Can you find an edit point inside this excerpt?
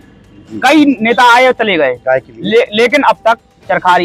no; 0 cuts

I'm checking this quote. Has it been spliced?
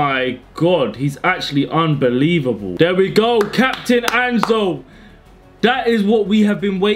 yes; 1 cut; at 2.7 s

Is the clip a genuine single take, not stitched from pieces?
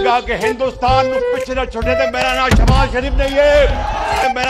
yes; 0 cuts

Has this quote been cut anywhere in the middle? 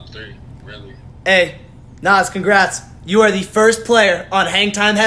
yes; 1 cut; at 1.1 s

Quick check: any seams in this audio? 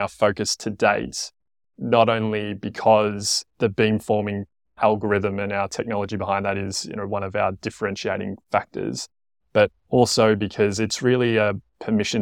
no; 0 cuts

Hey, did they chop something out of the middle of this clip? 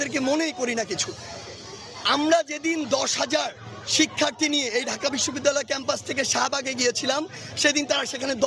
no; 0 cuts

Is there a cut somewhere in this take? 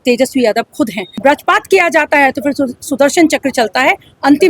yes; 1 cut; at 1.0 s

